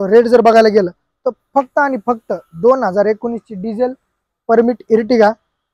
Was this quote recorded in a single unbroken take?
yes; 0 cuts

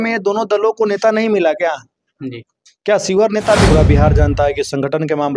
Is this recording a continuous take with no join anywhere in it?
no; 1 cut; at 3.7 s

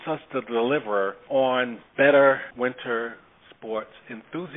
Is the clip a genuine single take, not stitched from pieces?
no; 3 cuts; at 1.2 s, 1.8 s, 2.5 s

